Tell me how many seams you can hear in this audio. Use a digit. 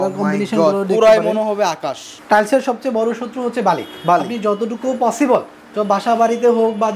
1